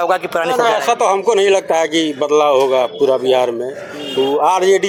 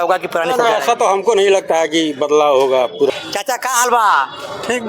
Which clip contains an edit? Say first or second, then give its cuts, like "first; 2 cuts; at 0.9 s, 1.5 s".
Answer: second; 1 cut; at 3.1 s